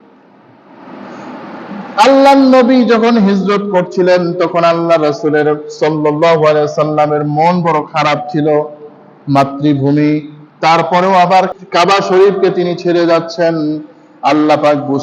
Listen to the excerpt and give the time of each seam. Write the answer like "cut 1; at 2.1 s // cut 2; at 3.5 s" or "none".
cut 1; at 11.5 s